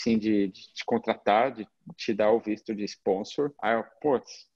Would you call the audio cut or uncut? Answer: cut